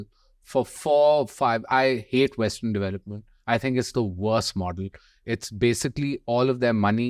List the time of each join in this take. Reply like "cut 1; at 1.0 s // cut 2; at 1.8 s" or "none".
none